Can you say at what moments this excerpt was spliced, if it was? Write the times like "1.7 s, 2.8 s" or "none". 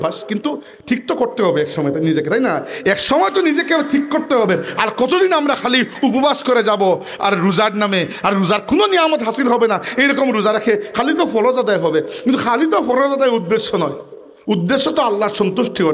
none